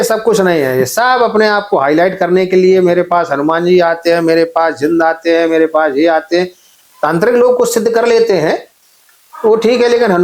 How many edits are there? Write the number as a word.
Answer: zero